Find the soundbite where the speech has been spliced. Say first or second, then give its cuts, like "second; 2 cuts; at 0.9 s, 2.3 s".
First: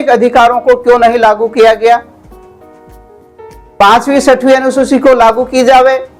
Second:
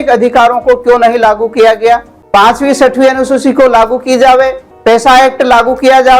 second; 2 cuts; at 2.1 s, 4.7 s